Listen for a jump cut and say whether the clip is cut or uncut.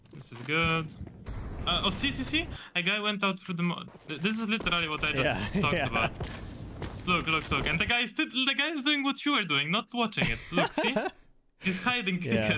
cut